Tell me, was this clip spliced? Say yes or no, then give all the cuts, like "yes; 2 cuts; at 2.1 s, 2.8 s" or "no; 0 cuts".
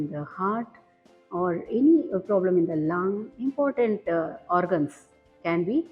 no; 0 cuts